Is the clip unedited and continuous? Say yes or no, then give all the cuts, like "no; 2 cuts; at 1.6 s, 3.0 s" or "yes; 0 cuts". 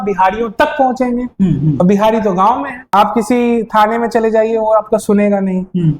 no; 1 cut; at 2.9 s